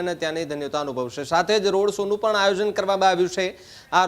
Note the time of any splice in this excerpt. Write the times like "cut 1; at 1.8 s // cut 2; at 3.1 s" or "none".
none